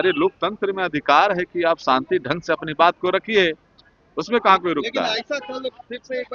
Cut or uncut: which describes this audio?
uncut